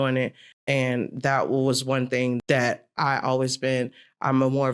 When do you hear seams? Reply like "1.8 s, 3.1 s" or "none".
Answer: 2.4 s